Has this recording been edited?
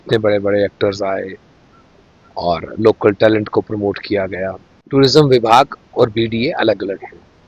yes; 1 cut; at 4.7 s

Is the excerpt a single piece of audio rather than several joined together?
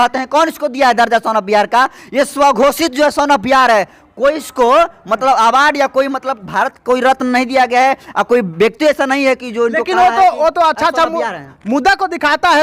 yes; 0 cuts

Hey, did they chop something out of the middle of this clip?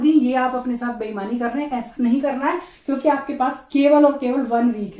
no; 0 cuts

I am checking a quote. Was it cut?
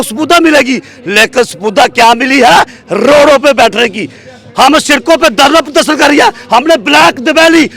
no; 0 cuts

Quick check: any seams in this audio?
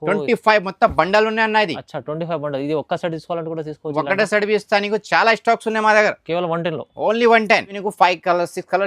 yes; 1 cut; at 7.8 s

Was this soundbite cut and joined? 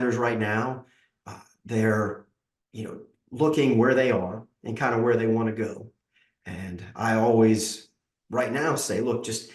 no; 0 cuts

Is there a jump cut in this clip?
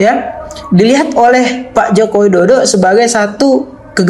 no; 0 cuts

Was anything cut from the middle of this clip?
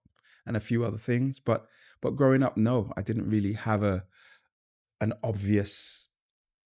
no; 0 cuts

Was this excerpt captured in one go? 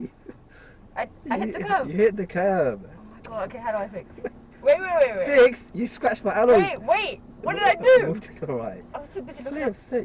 yes; 0 cuts

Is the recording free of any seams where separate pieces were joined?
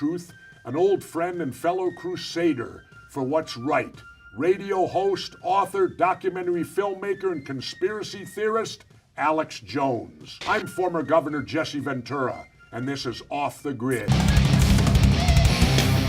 no; 1 cut; at 11.9 s

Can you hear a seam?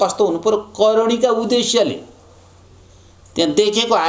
no; 0 cuts

